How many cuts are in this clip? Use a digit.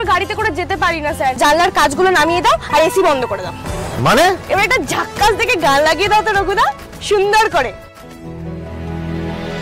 2